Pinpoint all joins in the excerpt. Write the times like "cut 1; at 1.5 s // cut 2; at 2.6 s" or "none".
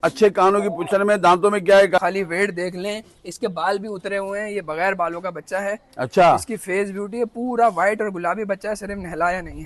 cut 1; at 2.0 s